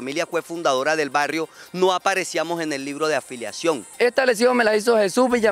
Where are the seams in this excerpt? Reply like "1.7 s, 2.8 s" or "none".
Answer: 3.9 s

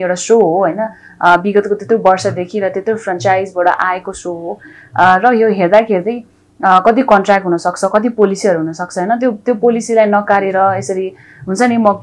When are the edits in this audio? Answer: none

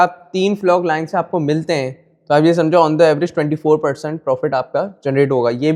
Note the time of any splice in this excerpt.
none

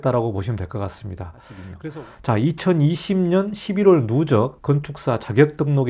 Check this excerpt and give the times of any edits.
1.8 s

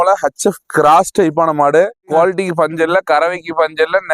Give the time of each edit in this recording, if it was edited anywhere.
2.1 s

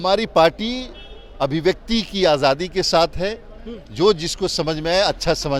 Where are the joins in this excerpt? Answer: none

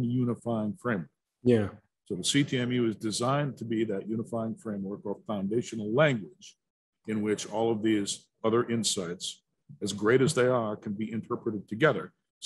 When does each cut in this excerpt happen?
none

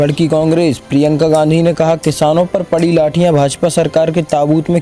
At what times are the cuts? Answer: none

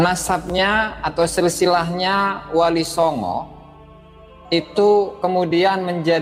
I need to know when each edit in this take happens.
none

